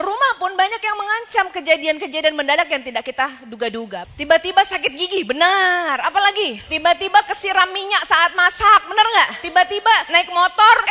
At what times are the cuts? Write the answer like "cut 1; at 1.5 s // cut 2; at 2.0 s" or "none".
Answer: cut 1; at 4.0 s